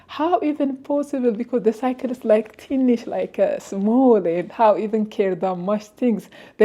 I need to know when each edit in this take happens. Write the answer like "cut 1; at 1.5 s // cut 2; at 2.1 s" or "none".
none